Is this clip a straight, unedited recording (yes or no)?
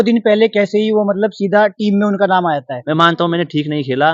no